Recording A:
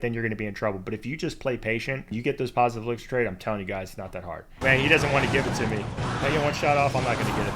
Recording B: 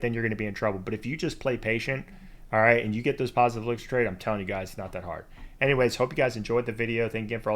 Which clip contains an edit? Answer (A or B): A